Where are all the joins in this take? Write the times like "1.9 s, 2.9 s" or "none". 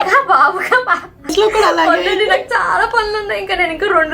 1.3 s